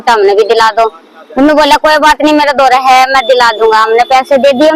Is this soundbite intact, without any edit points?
yes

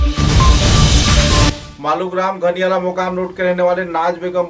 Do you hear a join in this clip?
yes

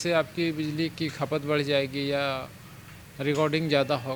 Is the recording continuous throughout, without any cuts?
yes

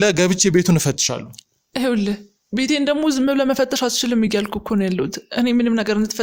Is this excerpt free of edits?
yes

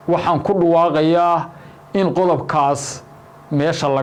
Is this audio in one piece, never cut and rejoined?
yes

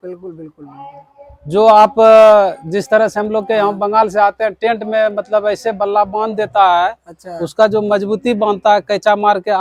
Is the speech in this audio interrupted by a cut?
no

